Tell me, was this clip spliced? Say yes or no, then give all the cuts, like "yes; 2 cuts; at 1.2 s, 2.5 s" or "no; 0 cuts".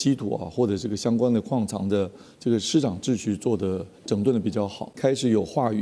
yes; 1 cut; at 4.9 s